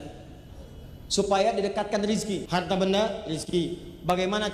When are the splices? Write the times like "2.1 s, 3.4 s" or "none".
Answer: 2.4 s